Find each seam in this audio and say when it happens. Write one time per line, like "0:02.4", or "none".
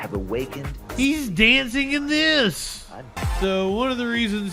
0:03.1

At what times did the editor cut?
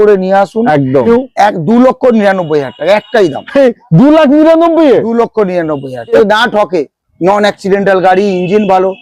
0:01.1
0:06.2

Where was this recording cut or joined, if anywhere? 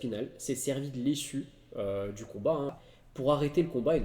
0:02.7

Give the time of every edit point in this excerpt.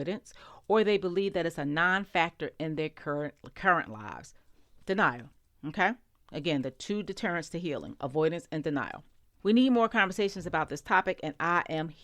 0:09.3

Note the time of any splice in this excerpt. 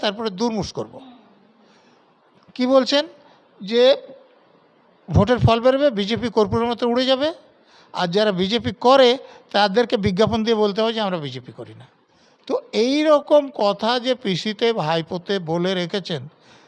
none

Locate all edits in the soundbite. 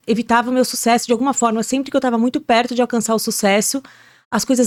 none

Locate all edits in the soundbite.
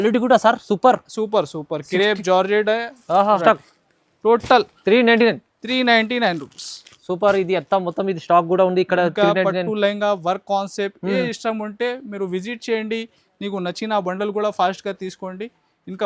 0:03.4

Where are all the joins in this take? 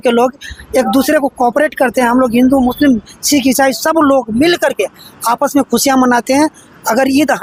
none

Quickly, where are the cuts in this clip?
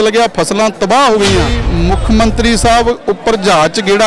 0:01.6

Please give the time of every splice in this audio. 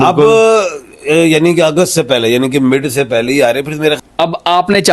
0:04.0

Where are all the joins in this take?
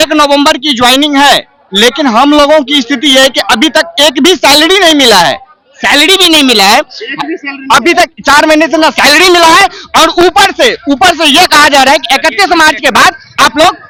none

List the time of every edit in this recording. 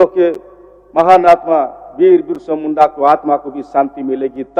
none

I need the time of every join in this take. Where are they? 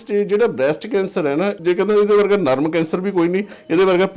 0:01.6

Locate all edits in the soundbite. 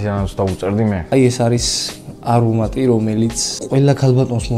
0:01.0
0:03.5

